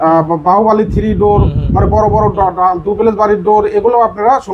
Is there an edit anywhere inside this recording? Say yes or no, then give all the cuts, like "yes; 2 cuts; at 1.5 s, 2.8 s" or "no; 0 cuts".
no; 0 cuts